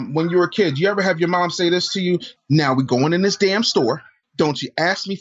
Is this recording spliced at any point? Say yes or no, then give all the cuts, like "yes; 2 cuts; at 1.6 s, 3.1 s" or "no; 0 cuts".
yes; 2 cuts; at 2.3 s, 4.2 s